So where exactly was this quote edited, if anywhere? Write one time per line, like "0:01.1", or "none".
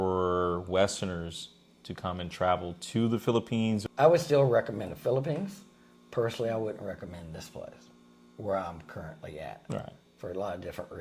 0:03.8